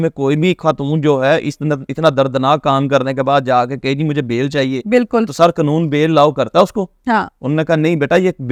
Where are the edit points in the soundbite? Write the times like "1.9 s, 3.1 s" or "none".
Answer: none